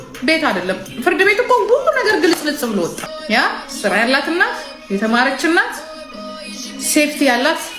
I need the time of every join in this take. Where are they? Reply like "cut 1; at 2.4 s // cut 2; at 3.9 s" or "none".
cut 1; at 3.1 s